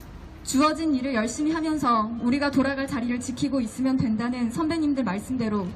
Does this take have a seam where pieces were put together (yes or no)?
yes